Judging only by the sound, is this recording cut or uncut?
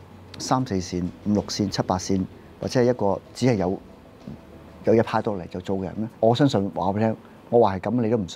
cut